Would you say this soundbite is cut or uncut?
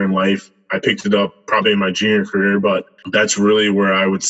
cut